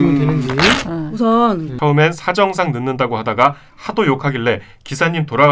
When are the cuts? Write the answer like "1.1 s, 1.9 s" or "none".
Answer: 1.7 s